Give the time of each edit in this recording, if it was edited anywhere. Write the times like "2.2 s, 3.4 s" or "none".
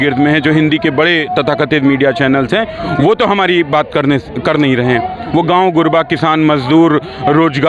none